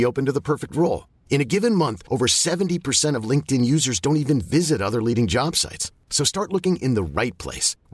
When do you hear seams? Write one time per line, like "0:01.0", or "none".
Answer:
none